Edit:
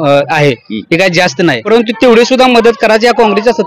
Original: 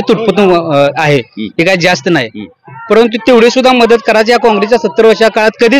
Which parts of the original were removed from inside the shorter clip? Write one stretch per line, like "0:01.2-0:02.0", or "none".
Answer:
0:02.3-0:02.9